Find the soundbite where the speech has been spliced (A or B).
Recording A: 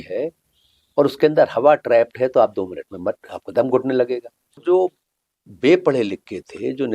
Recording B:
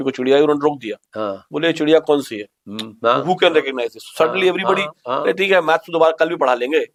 A